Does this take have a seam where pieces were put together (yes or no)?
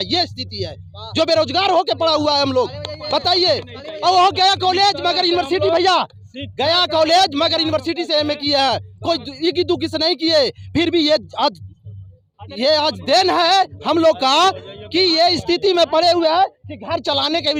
no